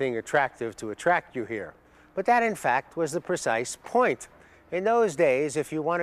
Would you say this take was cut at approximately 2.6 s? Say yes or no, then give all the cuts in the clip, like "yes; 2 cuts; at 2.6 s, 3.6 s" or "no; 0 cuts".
yes; 1 cut; at 2.6 s